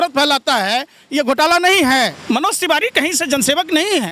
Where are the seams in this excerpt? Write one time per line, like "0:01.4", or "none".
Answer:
0:02.2